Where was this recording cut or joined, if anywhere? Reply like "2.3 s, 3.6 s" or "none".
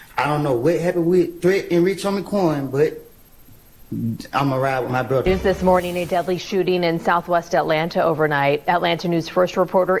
5.2 s

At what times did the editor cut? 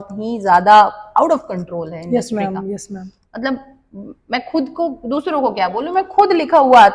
none

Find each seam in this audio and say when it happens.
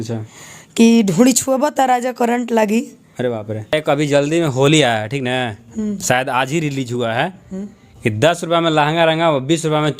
3.7 s

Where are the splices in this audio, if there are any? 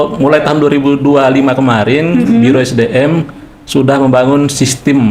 none

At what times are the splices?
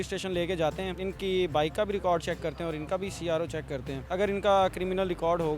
0.9 s, 4.0 s

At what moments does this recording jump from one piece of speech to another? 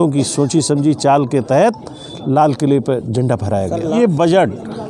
4.0 s

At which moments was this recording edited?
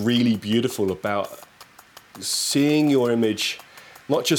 none

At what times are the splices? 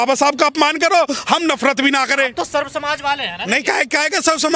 none

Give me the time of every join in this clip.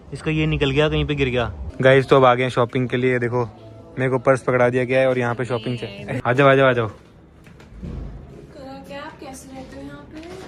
1.6 s, 6.2 s

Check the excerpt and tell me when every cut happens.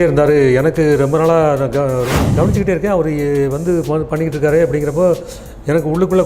2.2 s

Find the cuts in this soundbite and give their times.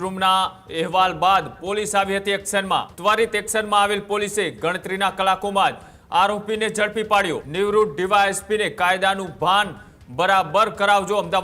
2.9 s, 7.4 s

